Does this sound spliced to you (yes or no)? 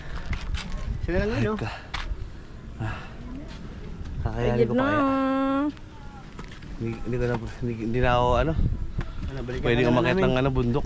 no